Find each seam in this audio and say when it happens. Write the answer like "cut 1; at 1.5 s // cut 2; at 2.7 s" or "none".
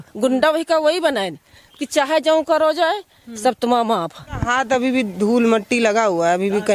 cut 1; at 4.4 s